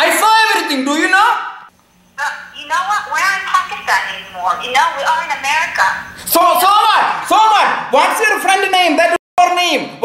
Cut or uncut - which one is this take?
uncut